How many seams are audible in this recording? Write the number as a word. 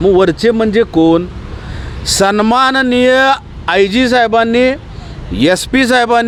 zero